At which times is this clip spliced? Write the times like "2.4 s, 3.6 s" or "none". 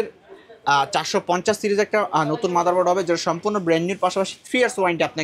none